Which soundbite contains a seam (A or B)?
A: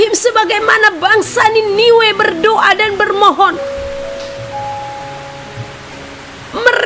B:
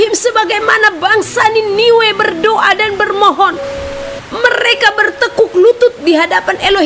B